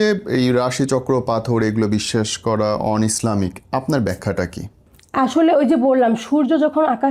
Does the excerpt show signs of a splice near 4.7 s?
no; 0 cuts

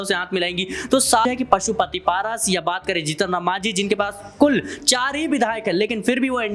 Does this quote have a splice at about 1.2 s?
yes; 1 cut; at 1.2 s

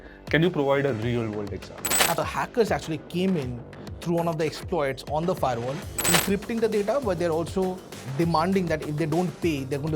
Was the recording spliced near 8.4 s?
no; 2 cuts; at 2.2 s, 6.0 s

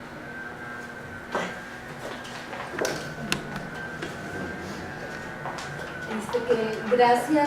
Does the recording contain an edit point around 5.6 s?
yes; 1 cut; at 5.6 s

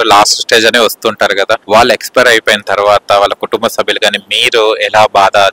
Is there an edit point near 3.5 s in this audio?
no; 1 cut; at 1.6 s

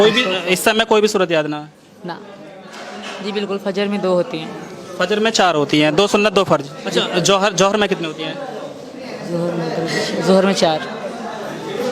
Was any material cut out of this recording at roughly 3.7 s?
no; 2 cuts; at 2.4 s, 6.8 s

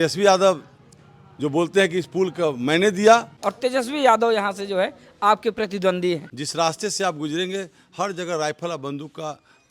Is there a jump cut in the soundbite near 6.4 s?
yes; 2 cuts; at 3.4 s, 6.4 s

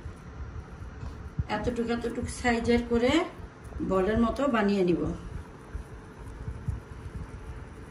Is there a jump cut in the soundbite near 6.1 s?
no; 0 cuts

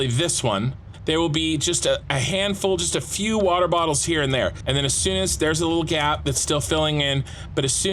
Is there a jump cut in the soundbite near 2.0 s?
yes; 3 cuts; at 0.9 s, 2.0 s, 4.6 s

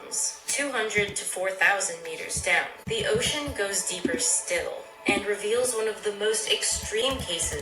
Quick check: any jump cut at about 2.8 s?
yes; 1 cut; at 2.8 s

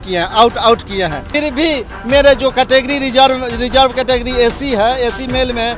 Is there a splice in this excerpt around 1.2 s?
yes; 1 cut; at 1.2 s

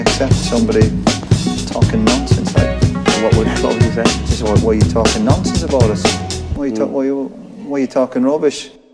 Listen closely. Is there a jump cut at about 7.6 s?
no; 0 cuts

